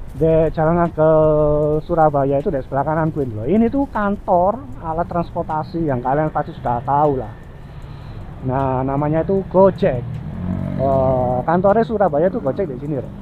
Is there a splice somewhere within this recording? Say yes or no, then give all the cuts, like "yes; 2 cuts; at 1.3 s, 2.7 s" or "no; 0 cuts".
no; 0 cuts